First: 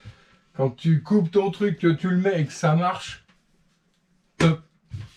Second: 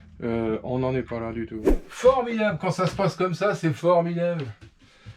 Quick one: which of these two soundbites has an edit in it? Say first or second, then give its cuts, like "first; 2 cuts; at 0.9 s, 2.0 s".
second; 1 cut; at 1.8 s